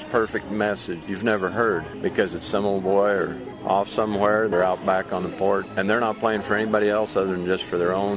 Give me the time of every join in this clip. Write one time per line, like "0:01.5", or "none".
0:01.0
0:01.9
0:03.5
0:04.5
0:05.7